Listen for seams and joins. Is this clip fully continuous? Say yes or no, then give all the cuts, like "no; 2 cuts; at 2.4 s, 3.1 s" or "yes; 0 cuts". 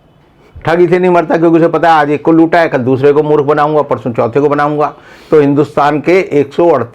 yes; 0 cuts